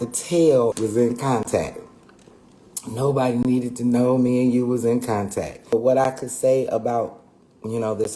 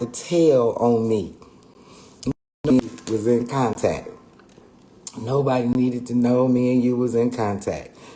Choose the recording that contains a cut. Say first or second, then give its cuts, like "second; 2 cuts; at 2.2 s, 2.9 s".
first; 2 cuts; at 0.7 s, 5.7 s